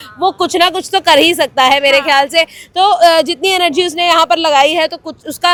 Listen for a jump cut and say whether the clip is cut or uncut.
uncut